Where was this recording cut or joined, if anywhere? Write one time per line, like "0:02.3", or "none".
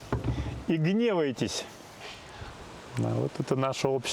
0:02.5

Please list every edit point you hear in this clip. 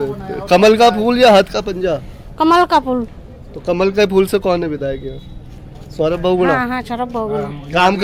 none

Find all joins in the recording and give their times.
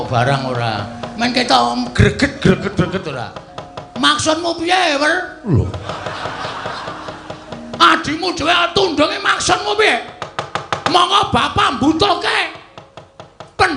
none

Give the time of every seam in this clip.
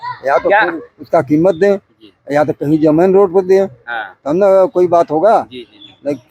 none

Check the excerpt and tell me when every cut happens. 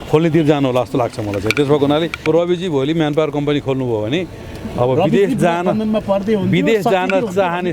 0:02.2

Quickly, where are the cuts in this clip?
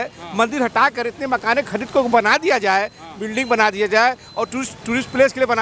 none

